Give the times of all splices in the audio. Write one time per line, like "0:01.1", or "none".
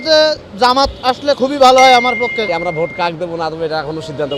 0:02.5